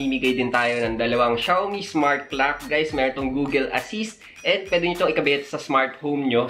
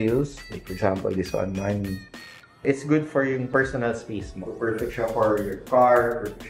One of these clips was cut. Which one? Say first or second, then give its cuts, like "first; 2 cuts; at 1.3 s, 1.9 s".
second; 2 cuts; at 2.6 s, 4.3 s